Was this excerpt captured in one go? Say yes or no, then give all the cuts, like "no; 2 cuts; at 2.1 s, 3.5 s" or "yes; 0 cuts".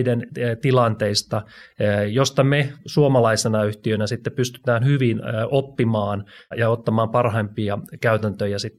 no; 1 cut; at 6.5 s